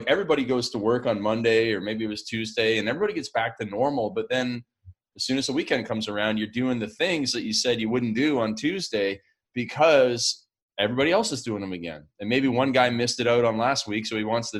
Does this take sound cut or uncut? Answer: uncut